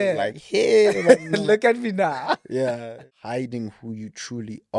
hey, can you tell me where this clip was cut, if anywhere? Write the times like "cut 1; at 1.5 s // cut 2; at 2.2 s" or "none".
cut 1; at 3.1 s